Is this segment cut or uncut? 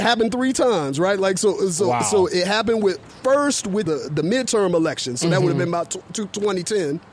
cut